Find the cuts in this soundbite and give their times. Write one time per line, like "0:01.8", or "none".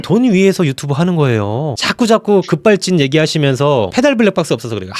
0:01.8